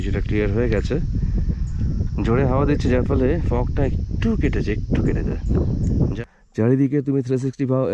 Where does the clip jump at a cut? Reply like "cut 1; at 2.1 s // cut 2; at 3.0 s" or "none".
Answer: cut 1; at 6.2 s